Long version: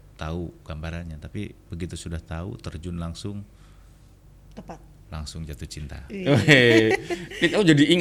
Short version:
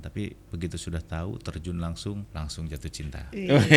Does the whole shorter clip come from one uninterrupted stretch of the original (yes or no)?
no